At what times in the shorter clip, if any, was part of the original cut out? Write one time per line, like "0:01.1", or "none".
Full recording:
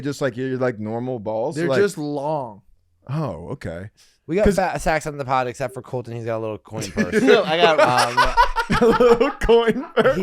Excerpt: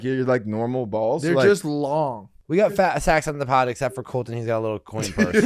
0:02.3